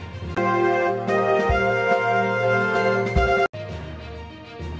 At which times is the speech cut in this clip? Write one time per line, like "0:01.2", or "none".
0:02.2
0:03.1